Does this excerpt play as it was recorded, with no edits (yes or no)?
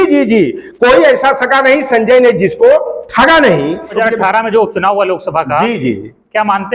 no